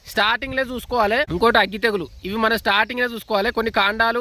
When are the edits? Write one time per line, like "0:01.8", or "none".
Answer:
0:01.3